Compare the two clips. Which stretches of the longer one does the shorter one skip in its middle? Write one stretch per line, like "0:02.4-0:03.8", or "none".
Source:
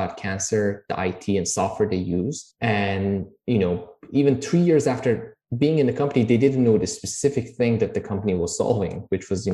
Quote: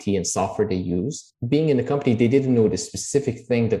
0:02.5-0:05.3